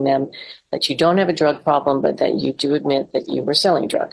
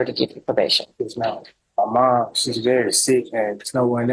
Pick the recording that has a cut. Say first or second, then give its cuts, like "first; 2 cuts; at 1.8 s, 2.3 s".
second; 1 cut; at 1.6 s